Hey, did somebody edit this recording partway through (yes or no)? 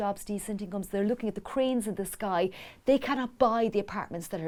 no